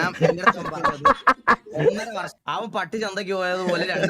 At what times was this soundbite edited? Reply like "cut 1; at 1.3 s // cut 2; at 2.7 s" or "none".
cut 1; at 2.4 s